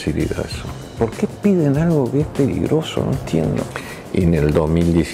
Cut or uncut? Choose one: cut